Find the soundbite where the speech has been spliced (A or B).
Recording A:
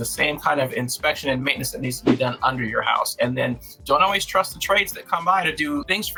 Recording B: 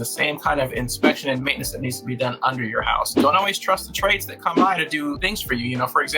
B